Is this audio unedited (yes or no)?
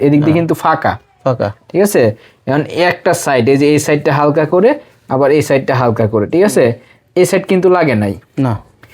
yes